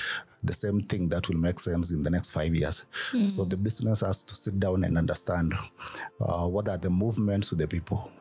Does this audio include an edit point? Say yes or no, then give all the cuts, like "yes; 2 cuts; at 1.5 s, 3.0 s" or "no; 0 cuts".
no; 0 cuts